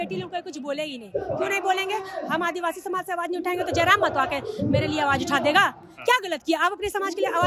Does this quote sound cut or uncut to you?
uncut